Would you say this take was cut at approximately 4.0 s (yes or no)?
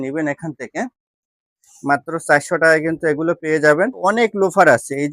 yes